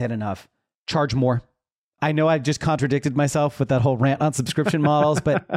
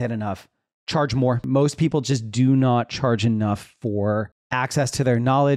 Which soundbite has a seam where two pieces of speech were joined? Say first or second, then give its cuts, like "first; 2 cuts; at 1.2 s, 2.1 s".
second; 2 cuts; at 1.4 s, 4.4 s